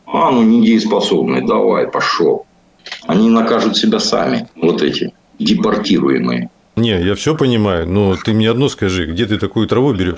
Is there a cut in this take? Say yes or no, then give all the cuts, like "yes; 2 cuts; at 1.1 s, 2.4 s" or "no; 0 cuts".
yes; 2 cuts; at 4.5 s, 6.8 s